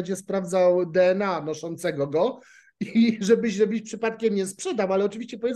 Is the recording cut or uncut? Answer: uncut